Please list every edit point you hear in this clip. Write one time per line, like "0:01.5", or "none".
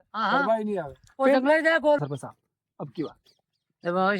0:02.0